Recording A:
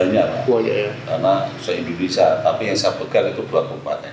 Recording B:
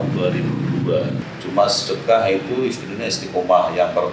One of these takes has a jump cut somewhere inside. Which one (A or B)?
B